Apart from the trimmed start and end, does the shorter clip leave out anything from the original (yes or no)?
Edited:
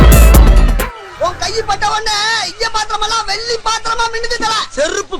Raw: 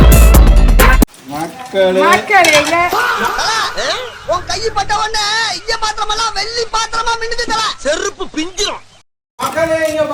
yes